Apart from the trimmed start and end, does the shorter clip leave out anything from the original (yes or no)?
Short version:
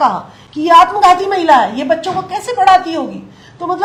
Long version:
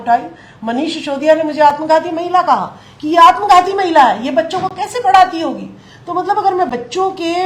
no